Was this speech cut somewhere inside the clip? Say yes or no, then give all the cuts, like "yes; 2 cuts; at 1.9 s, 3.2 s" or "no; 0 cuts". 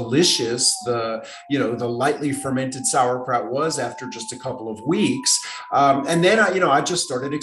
no; 0 cuts